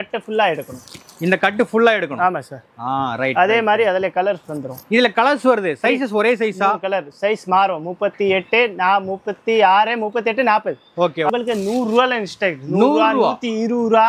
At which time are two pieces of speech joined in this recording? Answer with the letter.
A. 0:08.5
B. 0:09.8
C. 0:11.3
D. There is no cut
C